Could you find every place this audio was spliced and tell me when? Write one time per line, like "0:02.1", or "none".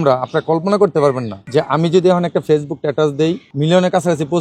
0:01.3
0:03.5